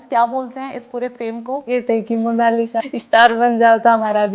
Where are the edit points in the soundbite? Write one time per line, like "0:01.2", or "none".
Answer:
0:01.7
0:02.9